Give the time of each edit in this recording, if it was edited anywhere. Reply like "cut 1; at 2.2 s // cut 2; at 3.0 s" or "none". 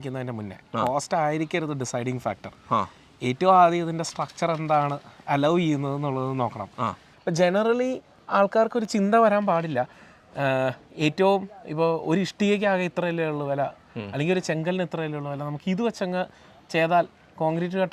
cut 1; at 7.1 s

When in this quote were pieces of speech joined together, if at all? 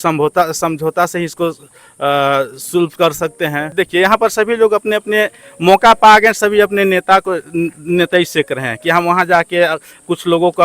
cut 1; at 3.7 s

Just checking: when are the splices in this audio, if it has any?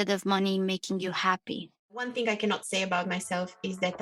cut 1; at 2.1 s

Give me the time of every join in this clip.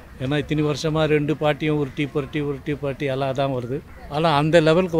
cut 1; at 3.9 s

